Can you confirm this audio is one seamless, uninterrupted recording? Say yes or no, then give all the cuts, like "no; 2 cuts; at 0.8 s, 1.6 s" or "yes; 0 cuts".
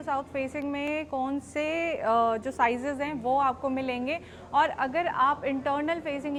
yes; 0 cuts